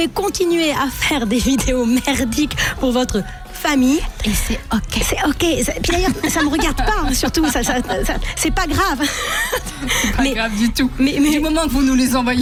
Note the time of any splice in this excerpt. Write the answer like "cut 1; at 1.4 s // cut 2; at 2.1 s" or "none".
none